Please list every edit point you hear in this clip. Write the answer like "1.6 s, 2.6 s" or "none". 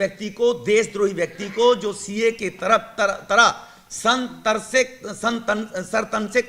none